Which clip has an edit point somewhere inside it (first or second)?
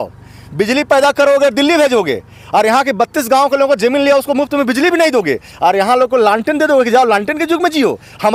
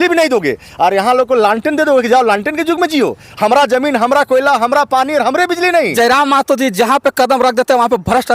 second